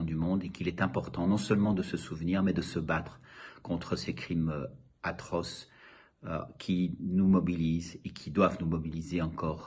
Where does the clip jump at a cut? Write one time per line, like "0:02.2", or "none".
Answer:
none